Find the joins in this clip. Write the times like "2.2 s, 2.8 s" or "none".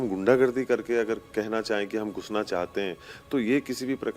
none